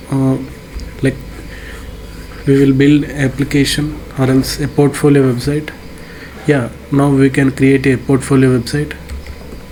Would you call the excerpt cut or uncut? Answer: uncut